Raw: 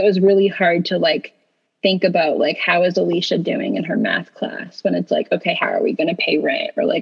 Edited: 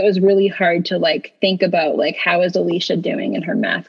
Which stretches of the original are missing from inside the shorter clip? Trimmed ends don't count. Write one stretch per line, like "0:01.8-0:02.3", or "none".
0:01.3-0:01.7